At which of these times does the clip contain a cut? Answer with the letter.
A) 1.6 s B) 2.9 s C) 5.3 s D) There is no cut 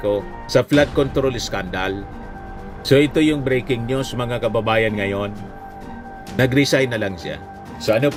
D